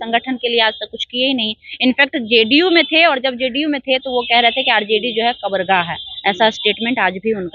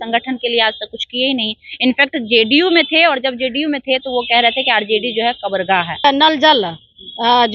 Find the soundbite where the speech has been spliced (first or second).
second